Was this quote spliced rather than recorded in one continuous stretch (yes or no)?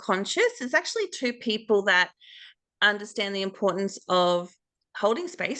no